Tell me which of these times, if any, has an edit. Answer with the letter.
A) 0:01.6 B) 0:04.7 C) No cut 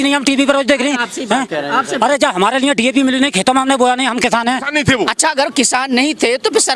B